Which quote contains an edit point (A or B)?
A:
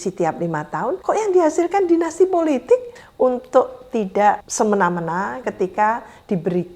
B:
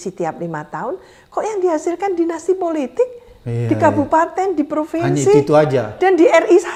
A